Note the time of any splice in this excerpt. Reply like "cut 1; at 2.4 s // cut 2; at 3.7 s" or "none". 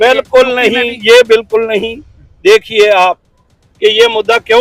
none